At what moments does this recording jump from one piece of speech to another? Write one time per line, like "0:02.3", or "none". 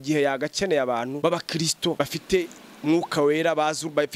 0:01.2
0:02.0